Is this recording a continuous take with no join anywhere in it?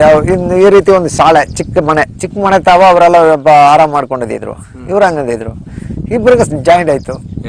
yes; 0 cuts

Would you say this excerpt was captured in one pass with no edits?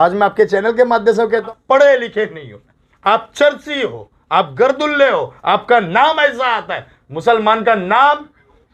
no; 1 cut; at 1.4 s

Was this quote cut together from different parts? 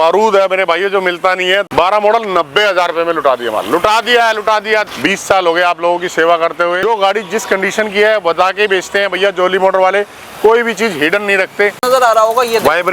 yes; 4 cuts; at 1.7 s, 4.9 s, 6.8 s, 11.8 s

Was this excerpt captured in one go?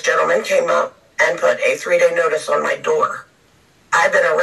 yes; 0 cuts

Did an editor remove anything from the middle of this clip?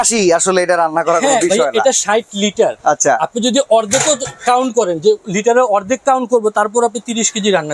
no; 0 cuts

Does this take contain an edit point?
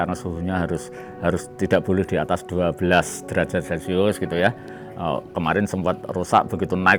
no; 0 cuts

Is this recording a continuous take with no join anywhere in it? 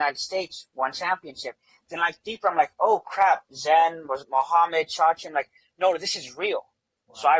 yes; 0 cuts

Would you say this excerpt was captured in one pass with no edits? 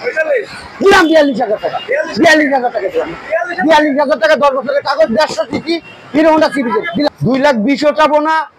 no; 1 cut; at 7.1 s

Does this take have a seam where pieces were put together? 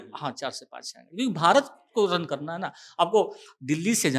no; 0 cuts

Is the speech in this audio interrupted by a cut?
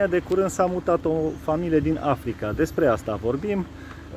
no; 0 cuts

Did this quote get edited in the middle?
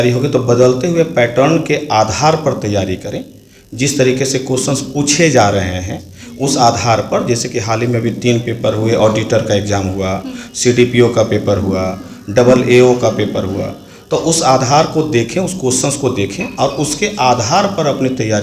no; 0 cuts

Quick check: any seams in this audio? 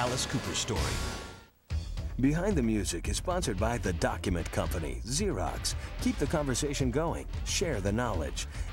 yes; 1 cut; at 1.5 s

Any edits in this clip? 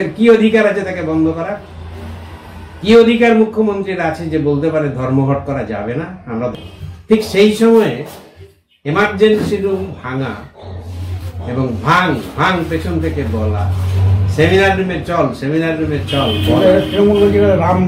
yes; 1 cut; at 6.5 s

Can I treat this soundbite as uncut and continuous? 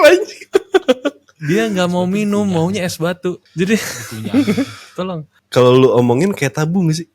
no; 2 cuts; at 1.3 s, 5.4 s

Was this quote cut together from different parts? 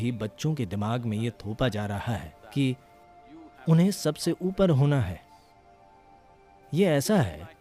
no; 0 cuts

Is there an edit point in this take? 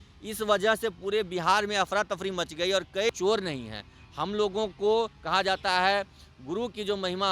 yes; 1 cut; at 3.1 s

